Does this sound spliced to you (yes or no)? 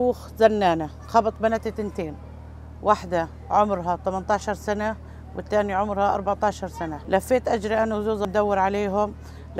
yes